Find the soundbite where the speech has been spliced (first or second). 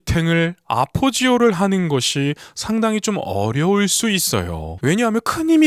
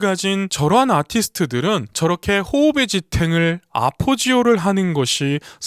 second